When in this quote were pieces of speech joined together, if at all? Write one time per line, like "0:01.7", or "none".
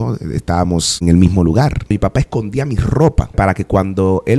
0:01.0
0:01.9
0:03.4